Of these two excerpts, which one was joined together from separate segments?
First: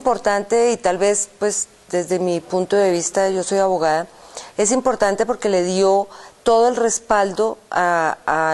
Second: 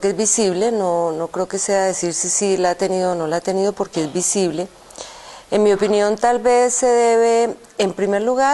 second; 1 cut; at 6.2 s

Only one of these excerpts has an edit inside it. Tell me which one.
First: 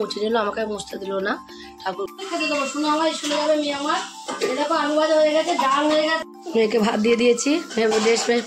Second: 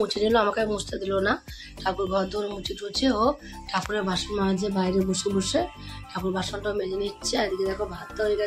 first; 2 cuts; at 2.1 s, 6.3 s

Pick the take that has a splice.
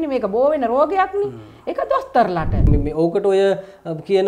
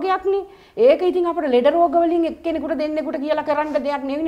first; 1 cut; at 2.7 s

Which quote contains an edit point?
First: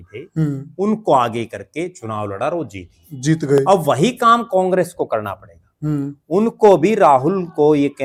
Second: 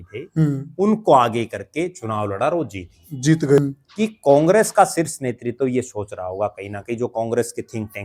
second; 1 cut; at 3.6 s

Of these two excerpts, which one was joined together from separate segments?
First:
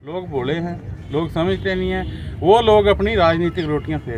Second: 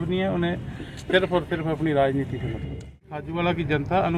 second; 1 cut; at 3.0 s

